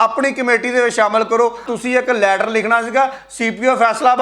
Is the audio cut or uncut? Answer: cut